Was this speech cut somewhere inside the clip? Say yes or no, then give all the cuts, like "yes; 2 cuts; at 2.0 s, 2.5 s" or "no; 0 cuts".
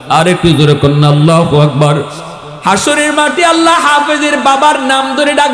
yes; 1 cut; at 2.2 s